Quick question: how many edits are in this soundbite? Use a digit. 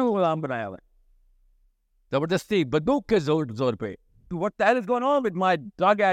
1